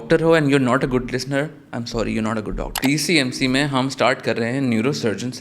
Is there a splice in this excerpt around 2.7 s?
yes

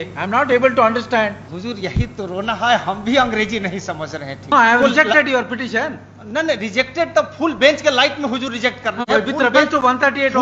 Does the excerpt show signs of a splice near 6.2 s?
no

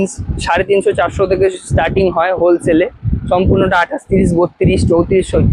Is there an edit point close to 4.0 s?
no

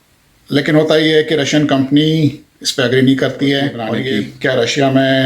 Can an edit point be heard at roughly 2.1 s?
no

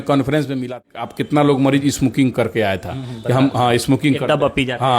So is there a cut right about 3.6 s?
no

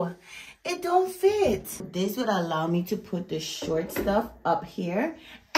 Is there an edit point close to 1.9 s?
yes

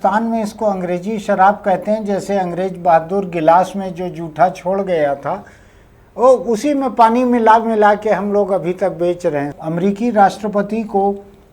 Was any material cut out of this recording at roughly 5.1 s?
no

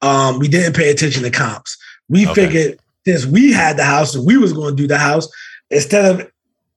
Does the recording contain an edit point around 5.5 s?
yes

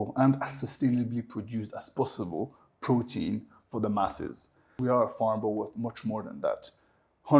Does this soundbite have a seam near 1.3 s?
no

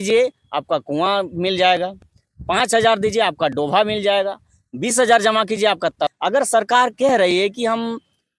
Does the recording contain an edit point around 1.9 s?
no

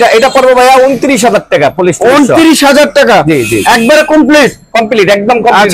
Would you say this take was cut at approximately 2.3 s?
no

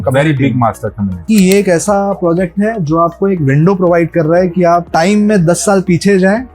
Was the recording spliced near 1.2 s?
yes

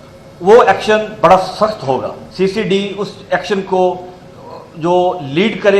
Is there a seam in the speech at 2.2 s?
yes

